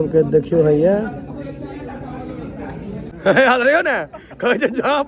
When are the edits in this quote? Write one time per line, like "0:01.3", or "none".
0:03.1